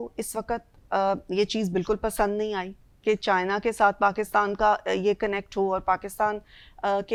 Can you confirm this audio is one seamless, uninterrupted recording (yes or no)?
yes